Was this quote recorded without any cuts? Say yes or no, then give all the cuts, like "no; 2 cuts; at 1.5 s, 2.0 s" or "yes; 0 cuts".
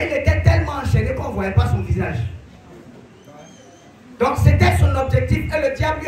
yes; 0 cuts